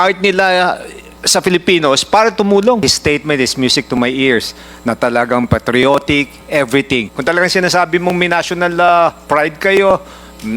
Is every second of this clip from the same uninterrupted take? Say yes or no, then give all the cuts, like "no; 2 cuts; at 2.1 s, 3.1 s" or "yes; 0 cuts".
no; 2 cuts; at 2.8 s, 7.1 s